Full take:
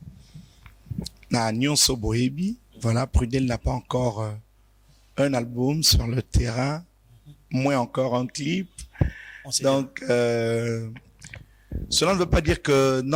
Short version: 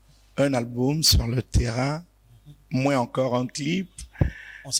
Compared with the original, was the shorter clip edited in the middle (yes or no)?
no